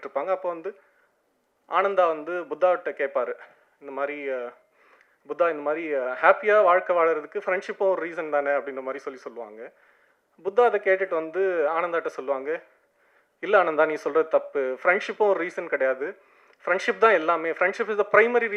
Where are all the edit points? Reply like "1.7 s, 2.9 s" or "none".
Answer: none